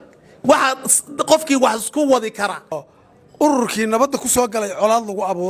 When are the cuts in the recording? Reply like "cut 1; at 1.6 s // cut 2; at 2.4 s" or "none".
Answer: cut 1; at 2.8 s